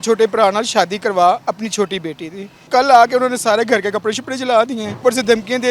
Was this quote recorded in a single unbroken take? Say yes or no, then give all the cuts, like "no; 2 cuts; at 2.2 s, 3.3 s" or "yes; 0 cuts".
no; 2 cuts; at 2.7 s, 5.0 s